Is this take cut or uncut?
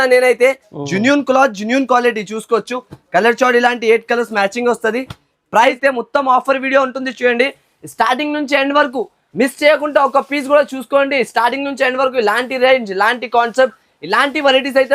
cut